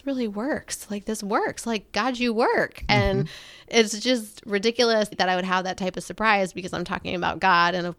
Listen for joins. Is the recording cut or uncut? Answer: uncut